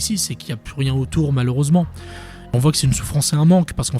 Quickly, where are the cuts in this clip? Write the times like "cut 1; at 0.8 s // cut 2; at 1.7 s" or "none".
cut 1; at 2.5 s